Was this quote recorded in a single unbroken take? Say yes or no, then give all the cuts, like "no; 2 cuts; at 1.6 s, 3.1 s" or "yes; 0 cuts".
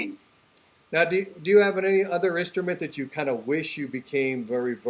yes; 0 cuts